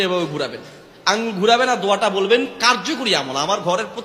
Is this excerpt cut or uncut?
cut